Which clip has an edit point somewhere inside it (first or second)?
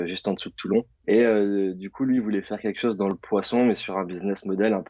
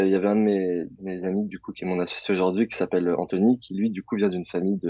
first